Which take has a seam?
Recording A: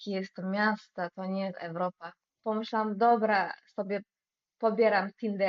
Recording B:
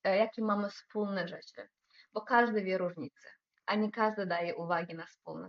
A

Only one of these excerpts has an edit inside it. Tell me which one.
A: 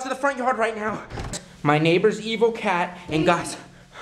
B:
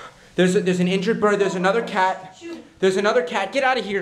A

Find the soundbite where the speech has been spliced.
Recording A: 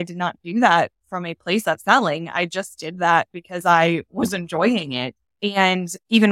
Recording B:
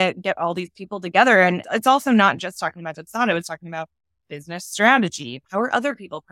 B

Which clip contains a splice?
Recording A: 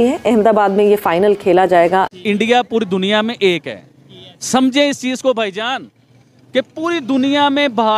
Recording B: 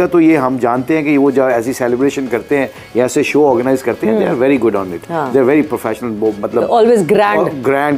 A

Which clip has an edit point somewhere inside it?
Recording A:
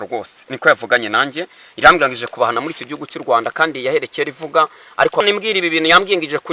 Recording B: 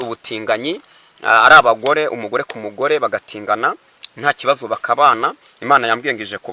A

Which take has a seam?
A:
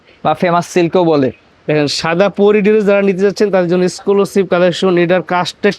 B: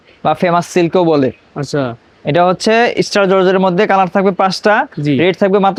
A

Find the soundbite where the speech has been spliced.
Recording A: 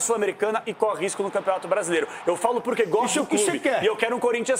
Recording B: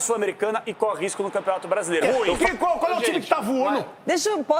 B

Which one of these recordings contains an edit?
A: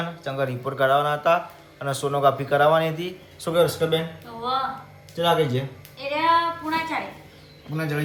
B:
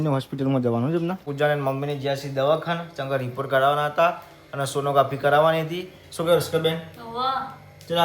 B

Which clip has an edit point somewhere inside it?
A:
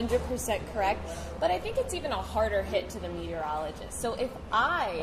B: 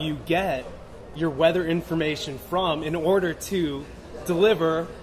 A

